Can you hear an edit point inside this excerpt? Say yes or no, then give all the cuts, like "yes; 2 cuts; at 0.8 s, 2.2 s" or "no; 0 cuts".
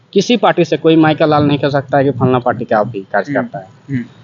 no; 0 cuts